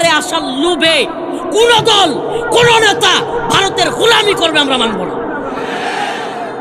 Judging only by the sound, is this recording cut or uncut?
uncut